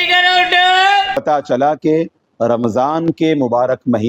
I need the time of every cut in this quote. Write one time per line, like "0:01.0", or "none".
0:01.2